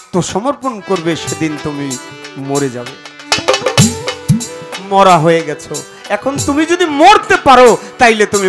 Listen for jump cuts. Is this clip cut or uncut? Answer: uncut